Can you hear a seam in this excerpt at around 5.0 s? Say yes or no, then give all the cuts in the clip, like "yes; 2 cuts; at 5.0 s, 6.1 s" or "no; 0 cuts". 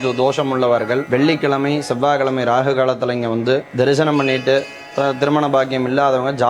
no; 2 cuts; at 1.0 s, 3.7 s